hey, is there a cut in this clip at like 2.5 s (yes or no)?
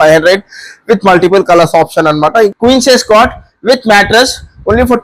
yes